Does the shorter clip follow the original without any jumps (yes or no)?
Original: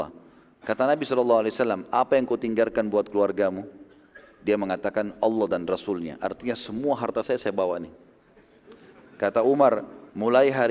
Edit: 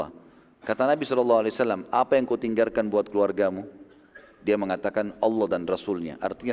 yes